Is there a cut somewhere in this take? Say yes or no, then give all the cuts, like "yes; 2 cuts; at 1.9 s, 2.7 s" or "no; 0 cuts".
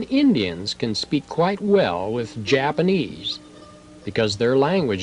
yes; 1 cut; at 1.6 s